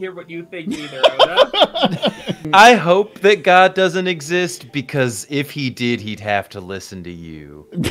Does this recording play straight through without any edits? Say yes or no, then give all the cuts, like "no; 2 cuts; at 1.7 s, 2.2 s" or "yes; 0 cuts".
no; 1 cut; at 2.5 s